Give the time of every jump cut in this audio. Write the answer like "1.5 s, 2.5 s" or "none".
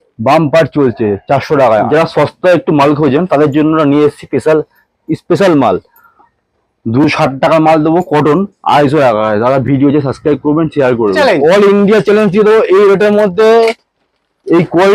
1.9 s, 11.2 s

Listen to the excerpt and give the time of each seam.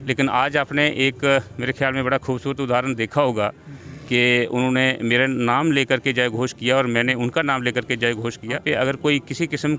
8.6 s

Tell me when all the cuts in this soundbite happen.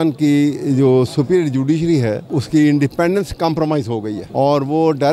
2.3 s, 4.2 s

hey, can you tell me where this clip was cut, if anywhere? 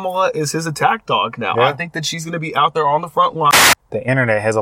3.5 s

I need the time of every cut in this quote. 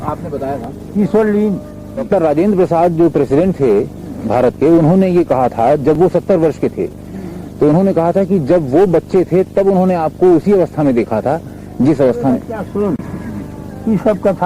2.1 s

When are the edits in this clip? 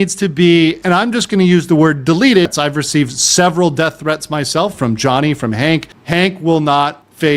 2.5 s, 5.9 s

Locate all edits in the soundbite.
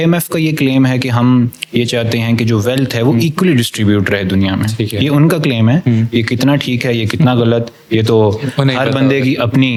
none

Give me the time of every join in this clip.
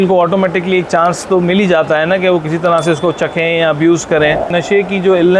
4.5 s

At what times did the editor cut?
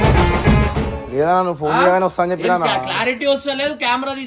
1.0 s

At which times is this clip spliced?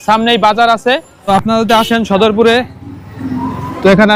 1.3 s

